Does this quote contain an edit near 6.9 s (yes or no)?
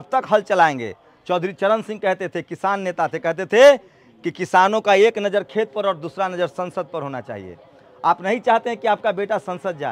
no